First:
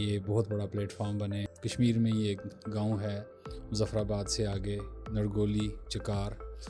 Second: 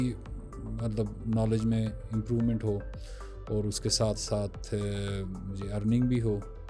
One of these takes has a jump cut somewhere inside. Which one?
first; 1 cut; at 1.4 s

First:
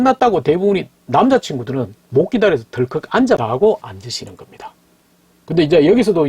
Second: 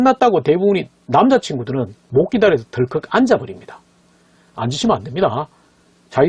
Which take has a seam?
first; 1 cut; at 3.4 s

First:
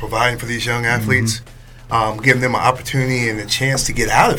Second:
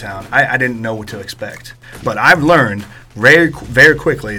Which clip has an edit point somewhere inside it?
second; 1 cut; at 2.0 s

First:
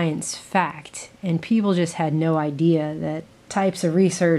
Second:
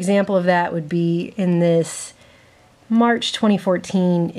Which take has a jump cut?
first; 1 cut; at 2.6 s

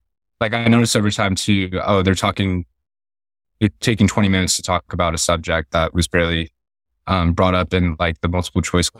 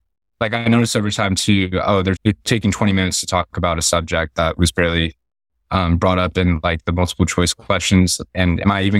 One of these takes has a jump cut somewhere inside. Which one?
second; 1 cut; at 2.2 s

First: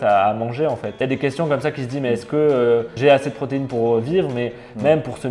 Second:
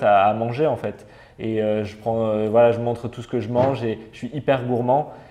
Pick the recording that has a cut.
first; 2 cuts; at 0.9 s, 2.9 s

